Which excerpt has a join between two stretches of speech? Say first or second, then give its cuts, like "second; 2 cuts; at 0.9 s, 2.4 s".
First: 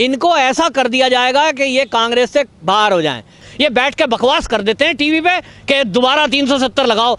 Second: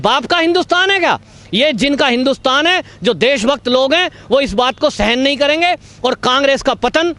first; 1 cut; at 3.4 s